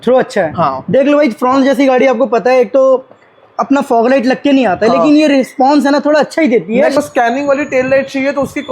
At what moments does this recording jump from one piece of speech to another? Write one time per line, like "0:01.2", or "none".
0:07.0